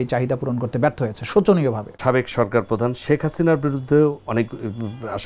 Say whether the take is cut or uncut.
cut